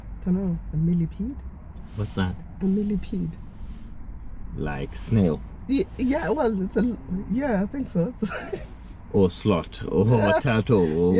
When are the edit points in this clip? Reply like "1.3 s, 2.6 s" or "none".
none